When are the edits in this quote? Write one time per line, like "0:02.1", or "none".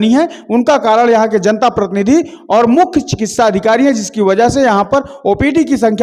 none